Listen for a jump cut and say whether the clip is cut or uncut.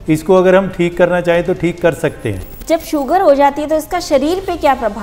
cut